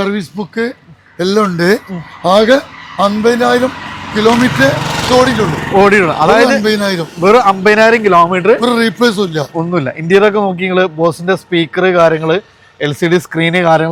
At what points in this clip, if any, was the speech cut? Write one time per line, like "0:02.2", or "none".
none